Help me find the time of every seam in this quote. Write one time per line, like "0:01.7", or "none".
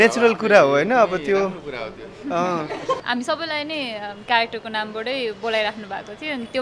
0:03.0